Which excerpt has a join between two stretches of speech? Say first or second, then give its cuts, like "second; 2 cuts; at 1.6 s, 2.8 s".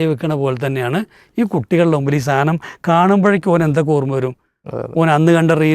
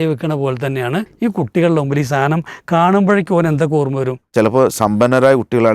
second; 2 cuts; at 1.1 s, 4.2 s